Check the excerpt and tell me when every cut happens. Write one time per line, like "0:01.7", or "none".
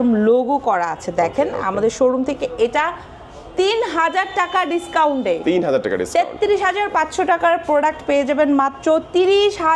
none